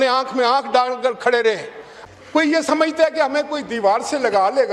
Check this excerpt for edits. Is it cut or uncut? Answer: cut